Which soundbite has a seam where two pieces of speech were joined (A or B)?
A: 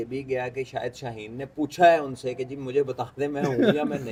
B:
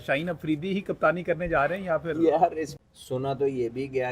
B